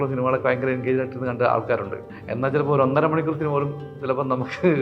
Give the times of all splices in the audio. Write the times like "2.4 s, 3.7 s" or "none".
2.1 s